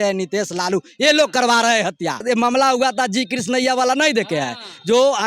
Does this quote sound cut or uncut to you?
cut